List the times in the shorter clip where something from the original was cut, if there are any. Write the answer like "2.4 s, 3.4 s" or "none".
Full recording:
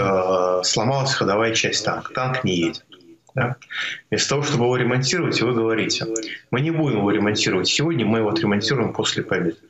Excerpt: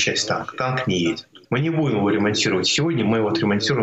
1.3 s